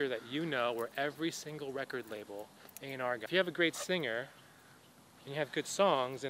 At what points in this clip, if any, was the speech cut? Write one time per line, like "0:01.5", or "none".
0:03.2